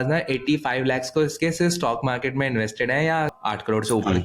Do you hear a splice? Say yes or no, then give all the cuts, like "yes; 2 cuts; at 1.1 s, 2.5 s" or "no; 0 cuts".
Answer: yes; 1 cut; at 3.3 s